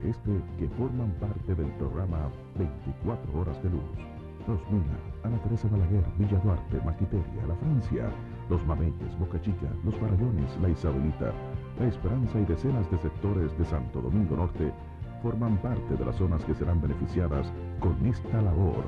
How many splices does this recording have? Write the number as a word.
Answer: zero